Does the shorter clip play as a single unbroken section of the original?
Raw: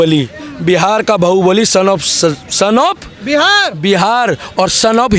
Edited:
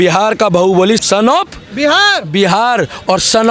no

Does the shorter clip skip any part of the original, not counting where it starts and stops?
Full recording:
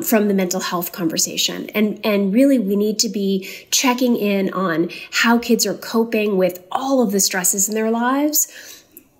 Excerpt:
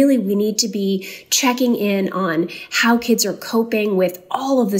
no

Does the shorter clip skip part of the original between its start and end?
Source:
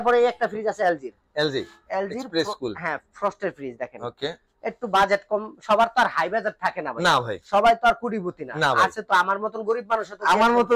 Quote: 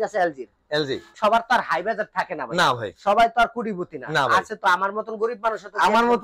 yes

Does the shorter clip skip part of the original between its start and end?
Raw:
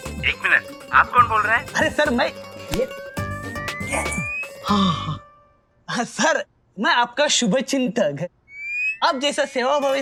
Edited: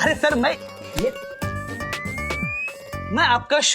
yes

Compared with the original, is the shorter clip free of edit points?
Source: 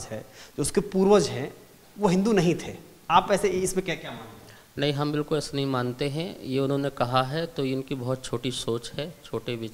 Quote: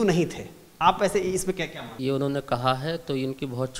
no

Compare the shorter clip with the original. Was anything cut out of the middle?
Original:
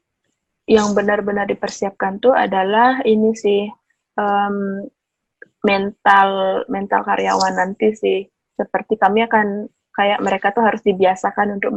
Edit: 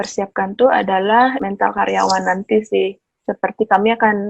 yes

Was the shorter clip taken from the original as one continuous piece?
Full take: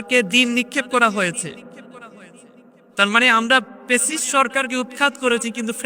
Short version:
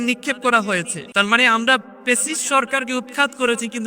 no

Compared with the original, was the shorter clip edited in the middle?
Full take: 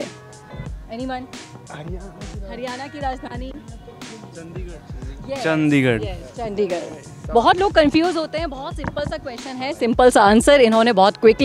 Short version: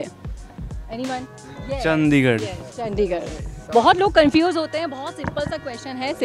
yes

